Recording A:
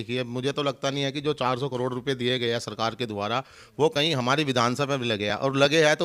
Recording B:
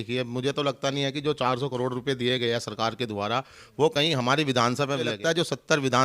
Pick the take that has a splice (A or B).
B